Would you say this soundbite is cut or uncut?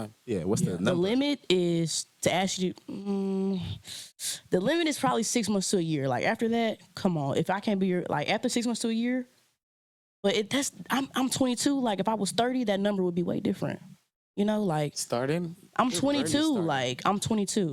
uncut